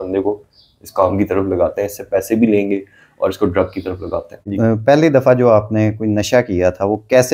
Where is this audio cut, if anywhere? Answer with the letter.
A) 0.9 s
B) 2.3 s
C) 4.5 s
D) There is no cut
C